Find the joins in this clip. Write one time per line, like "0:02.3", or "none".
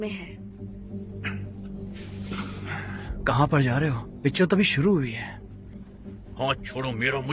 none